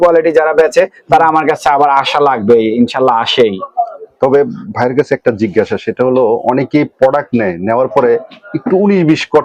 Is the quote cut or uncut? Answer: uncut